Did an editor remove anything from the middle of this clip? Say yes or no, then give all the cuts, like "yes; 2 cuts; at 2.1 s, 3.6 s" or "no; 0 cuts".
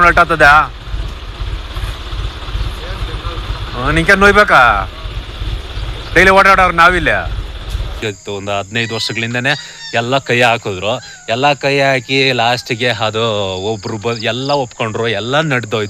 yes; 1 cut; at 8.0 s